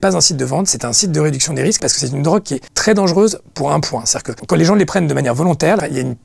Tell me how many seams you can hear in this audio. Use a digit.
1